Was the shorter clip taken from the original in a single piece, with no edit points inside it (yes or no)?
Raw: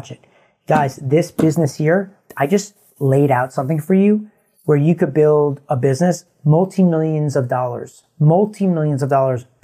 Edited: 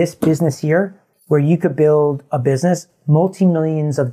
no